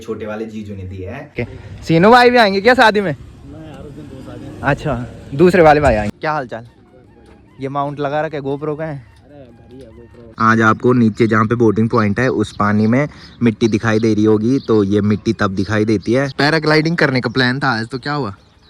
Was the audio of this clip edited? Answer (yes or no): yes